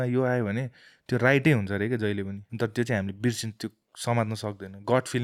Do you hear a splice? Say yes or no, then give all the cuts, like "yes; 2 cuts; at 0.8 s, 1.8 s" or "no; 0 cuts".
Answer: yes; 1 cut; at 2.4 s